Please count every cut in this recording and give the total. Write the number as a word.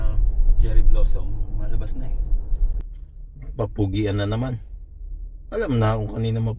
one